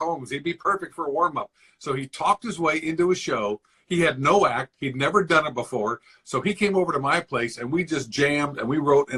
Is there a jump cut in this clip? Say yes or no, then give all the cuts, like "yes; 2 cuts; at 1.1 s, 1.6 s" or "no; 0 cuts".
no; 0 cuts